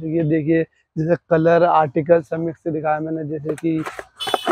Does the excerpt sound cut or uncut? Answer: uncut